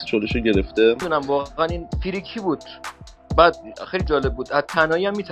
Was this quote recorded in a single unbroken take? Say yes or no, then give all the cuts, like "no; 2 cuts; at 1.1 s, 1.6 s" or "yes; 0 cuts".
no; 1 cut; at 1.0 s